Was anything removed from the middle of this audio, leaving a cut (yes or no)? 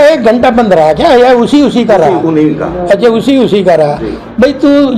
no